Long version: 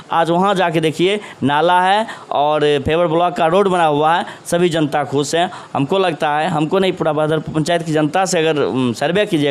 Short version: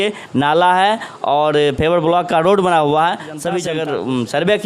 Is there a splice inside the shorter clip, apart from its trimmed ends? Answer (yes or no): yes